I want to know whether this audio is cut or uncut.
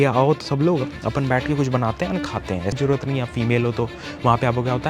cut